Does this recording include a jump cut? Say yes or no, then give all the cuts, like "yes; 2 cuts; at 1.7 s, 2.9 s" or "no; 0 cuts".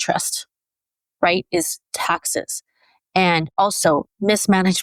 no; 0 cuts